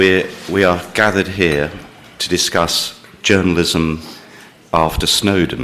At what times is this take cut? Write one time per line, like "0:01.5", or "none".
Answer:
0:01.9